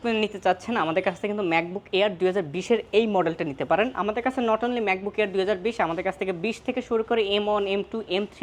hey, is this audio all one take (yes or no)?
yes